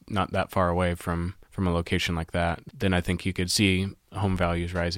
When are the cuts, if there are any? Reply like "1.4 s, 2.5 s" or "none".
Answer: 1.4 s, 2.6 s